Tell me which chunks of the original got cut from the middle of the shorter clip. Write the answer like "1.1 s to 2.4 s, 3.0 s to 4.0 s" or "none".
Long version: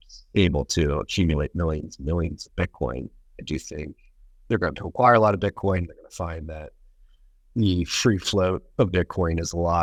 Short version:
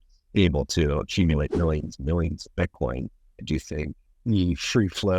4.0 s to 7.3 s